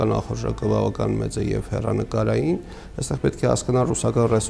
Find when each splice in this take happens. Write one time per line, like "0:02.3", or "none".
none